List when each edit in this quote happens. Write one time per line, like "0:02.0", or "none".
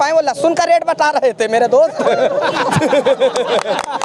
none